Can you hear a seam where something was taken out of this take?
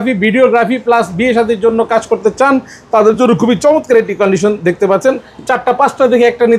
no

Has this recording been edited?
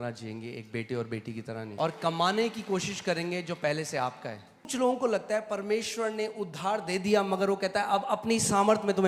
yes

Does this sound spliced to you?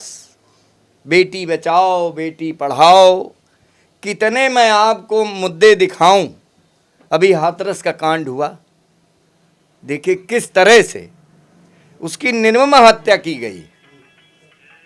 no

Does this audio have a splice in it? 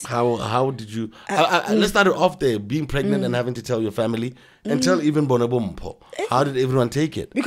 no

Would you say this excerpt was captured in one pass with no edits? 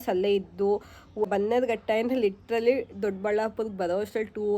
no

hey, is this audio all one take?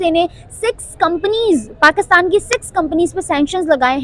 yes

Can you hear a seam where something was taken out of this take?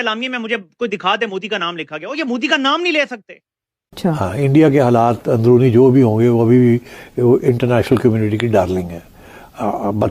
yes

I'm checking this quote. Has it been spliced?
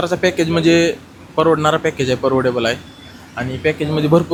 no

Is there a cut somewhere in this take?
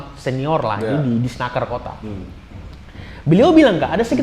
no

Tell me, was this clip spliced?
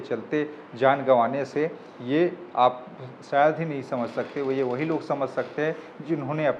no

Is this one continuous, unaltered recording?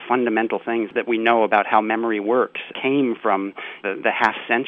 no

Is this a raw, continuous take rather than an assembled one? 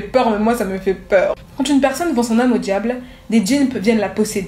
no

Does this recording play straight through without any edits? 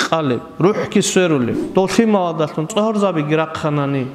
no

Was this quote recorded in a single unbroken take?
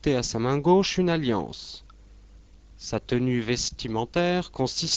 yes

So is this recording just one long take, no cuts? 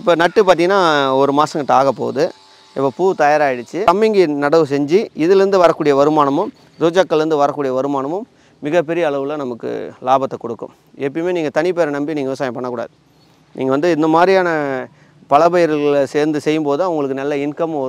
no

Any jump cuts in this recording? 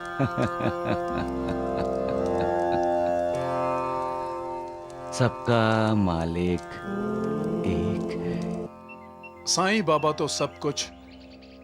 no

